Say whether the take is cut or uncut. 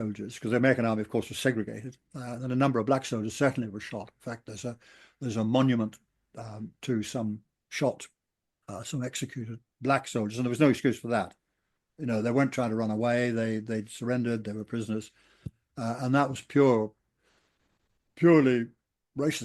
cut